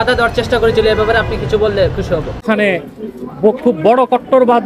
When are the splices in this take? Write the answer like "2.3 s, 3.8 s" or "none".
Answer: 2.4 s